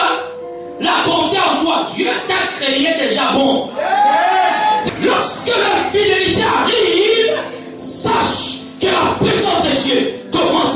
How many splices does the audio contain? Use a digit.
1